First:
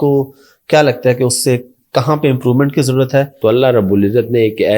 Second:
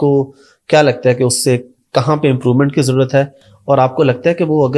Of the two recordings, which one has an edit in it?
first; 1 cut; at 3.3 s

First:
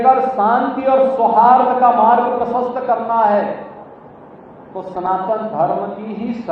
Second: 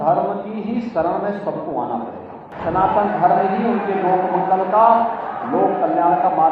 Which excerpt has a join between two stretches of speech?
second; 1 cut; at 2.5 s

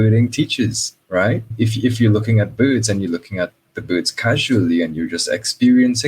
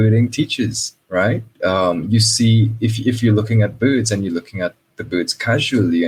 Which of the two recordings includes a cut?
first; 1 cut; at 1.5 s

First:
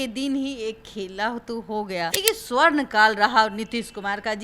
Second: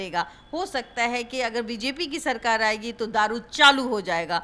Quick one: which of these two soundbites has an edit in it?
first; 1 cut; at 2.1 s

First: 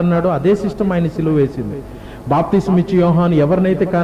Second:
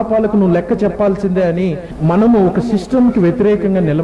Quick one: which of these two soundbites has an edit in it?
second; 1 cut; at 1.9 s

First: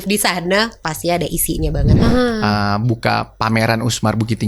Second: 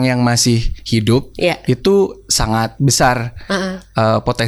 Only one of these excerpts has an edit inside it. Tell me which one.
first; 1 cut; at 1.9 s

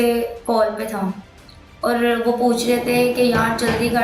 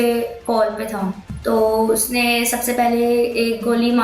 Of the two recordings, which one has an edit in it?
second; 1 cut; at 1.3 s

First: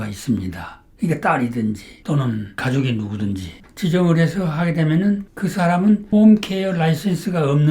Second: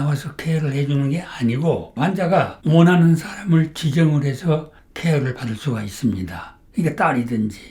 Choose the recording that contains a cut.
first; 2 cuts; at 3.5 s, 5.3 s

